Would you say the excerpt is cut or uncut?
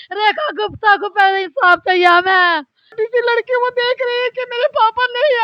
cut